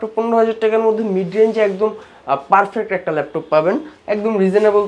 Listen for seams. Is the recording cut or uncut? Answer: cut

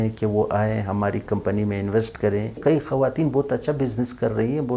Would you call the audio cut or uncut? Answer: cut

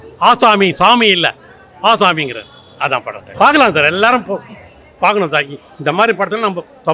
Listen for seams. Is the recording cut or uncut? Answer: cut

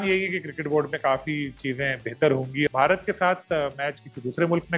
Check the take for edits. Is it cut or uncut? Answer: cut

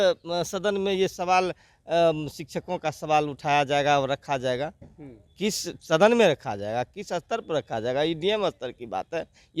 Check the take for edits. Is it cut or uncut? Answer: uncut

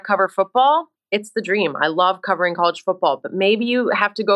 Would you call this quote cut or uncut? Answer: uncut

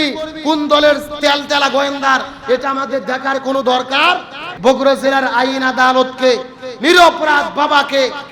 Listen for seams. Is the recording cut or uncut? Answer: cut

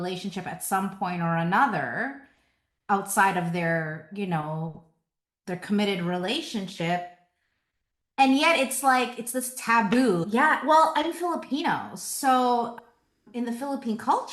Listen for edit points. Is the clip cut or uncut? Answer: cut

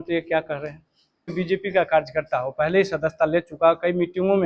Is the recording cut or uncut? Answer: cut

